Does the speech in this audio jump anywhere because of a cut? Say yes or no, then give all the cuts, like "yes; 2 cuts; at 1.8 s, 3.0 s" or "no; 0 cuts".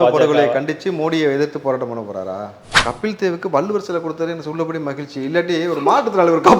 yes; 1 cut; at 2.6 s